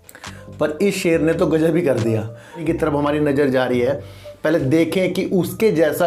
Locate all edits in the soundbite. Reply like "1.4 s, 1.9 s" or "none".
2.6 s